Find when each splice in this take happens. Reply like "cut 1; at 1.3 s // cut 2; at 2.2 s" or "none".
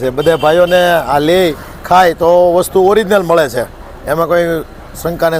none